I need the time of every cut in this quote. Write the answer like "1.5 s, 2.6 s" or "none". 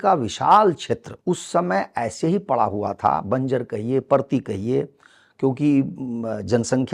1.1 s